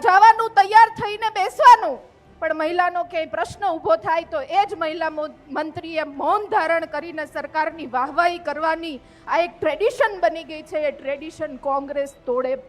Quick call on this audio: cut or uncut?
uncut